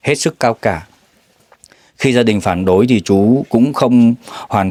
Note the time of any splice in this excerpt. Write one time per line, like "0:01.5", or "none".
none